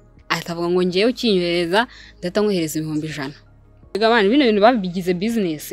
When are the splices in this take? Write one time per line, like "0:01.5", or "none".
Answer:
0:03.9